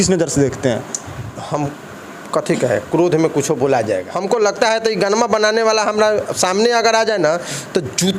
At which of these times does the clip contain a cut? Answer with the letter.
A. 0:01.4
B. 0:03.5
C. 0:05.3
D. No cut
D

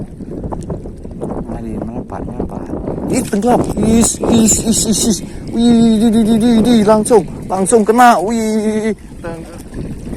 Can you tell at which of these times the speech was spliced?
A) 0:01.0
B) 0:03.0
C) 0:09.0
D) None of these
C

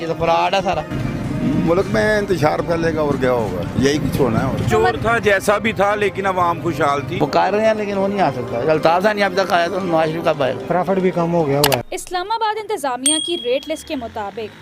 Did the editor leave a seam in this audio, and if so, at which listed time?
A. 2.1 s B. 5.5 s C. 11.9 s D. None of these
C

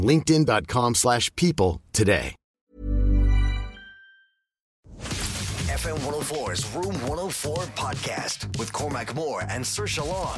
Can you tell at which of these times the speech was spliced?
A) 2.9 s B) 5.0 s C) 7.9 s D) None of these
B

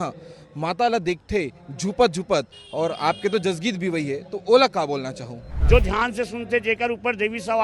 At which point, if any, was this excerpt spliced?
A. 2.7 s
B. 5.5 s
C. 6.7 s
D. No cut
B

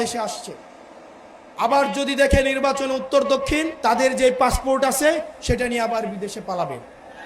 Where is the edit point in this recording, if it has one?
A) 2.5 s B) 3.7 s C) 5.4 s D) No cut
B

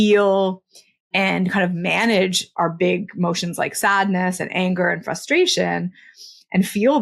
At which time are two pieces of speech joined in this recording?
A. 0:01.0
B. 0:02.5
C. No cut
B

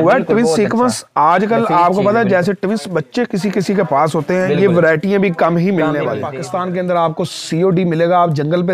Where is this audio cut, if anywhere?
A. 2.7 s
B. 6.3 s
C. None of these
B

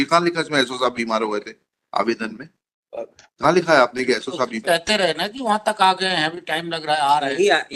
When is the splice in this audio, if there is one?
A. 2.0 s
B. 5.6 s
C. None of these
C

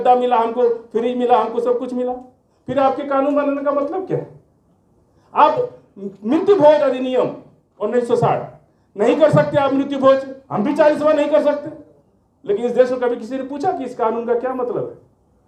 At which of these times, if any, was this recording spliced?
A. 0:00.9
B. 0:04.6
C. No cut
C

